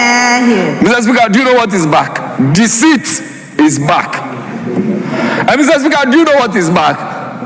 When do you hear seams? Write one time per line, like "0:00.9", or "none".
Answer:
none